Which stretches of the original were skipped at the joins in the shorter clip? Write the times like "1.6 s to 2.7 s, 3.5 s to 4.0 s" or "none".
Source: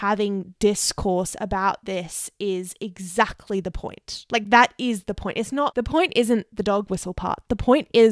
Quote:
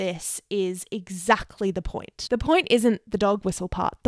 4.2 s to 5.7 s